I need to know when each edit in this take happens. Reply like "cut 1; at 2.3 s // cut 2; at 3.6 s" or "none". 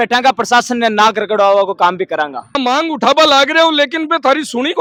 none